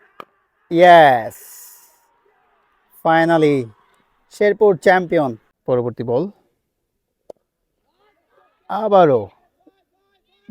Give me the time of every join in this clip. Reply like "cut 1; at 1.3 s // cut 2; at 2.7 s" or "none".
cut 1; at 5.5 s